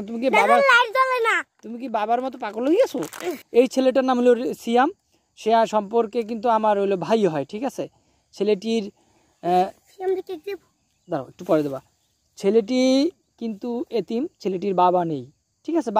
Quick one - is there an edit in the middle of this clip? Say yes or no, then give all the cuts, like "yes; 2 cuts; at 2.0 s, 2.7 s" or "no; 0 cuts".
yes; 1 cut; at 3.3 s